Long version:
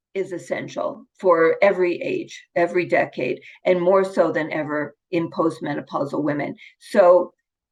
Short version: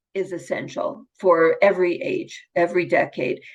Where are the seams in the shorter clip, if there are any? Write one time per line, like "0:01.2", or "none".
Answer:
none